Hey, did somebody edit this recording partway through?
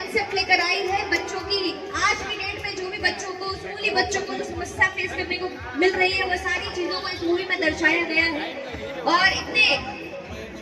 no; 0 cuts

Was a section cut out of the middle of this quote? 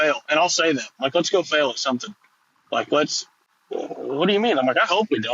no; 0 cuts

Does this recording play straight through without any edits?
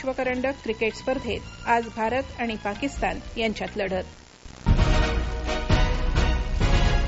no; 1 cut; at 4.5 s

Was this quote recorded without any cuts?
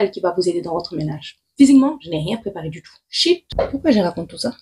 no; 2 cuts; at 1.5 s, 3.5 s

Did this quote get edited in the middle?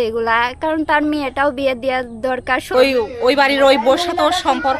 yes; 1 cut; at 2.7 s

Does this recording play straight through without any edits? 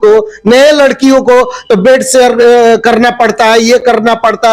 yes; 0 cuts

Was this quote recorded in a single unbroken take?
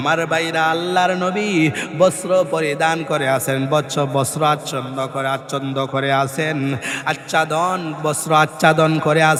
yes; 0 cuts

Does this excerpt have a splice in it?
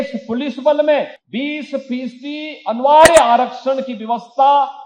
yes; 1 cut; at 1.2 s

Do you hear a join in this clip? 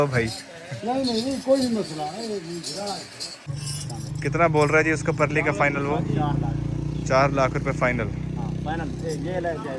yes; 1 cut; at 3.5 s

